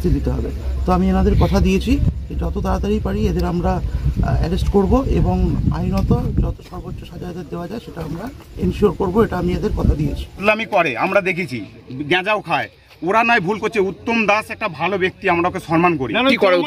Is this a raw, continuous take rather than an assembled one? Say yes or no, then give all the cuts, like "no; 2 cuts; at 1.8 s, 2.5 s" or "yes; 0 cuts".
no; 1 cut; at 10.3 s